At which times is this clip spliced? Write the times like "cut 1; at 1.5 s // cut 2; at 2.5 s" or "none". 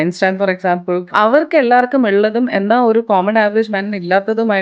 cut 1; at 1.1 s